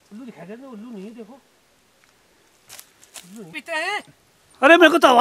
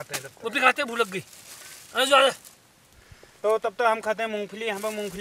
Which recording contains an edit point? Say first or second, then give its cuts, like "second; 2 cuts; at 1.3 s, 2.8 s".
first; 1 cut; at 3.5 s